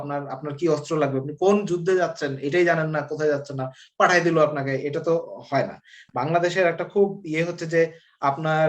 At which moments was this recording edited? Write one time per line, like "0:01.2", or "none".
none